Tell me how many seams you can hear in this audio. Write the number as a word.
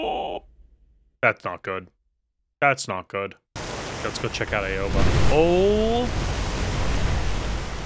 one